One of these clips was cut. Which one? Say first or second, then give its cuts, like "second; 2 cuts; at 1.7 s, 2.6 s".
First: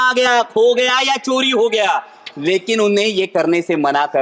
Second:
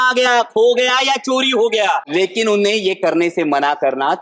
second; 1 cut; at 2.0 s